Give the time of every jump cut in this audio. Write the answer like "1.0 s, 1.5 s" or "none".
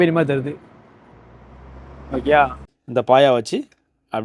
2.6 s